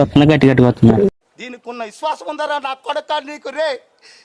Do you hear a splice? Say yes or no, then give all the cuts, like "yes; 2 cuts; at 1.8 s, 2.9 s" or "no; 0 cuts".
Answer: yes; 1 cut; at 1.1 s